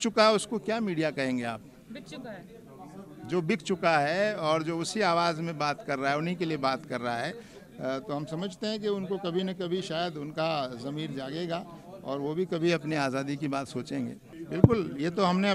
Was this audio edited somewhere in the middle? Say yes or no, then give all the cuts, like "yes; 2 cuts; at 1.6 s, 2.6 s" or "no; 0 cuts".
no; 0 cuts